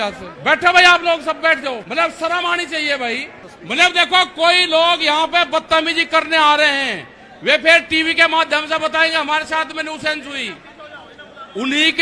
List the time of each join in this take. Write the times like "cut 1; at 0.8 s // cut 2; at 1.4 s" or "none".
none